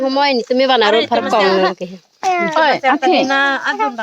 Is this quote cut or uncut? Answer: uncut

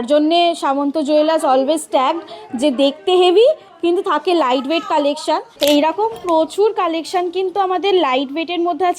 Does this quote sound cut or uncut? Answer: cut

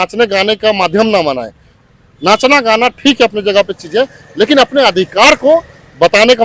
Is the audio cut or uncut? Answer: uncut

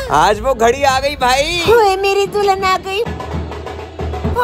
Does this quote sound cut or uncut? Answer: cut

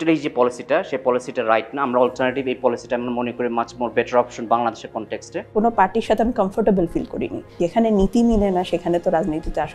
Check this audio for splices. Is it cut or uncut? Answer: cut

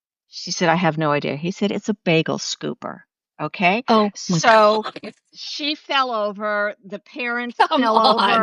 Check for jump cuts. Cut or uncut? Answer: uncut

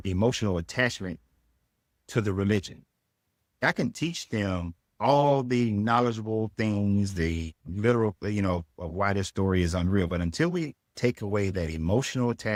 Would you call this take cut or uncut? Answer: uncut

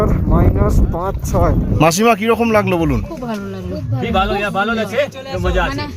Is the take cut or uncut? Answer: cut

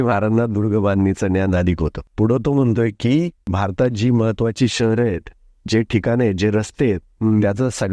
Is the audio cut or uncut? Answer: cut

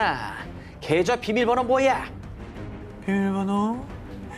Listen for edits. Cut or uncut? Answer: uncut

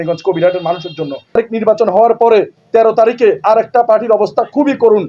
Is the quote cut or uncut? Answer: cut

